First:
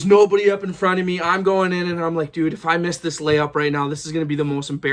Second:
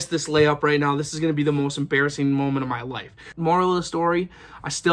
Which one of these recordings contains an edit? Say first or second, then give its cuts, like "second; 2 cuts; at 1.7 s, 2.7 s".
second; 1 cut; at 3.3 s